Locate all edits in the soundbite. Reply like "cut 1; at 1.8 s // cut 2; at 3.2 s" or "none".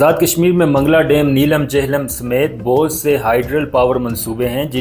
none